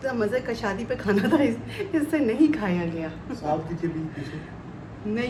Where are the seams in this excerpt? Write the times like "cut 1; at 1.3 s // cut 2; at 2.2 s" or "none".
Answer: none